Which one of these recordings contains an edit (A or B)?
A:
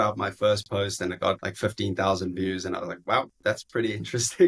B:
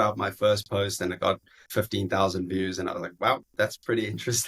A